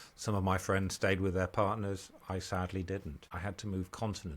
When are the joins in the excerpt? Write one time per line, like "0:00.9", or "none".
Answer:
0:03.2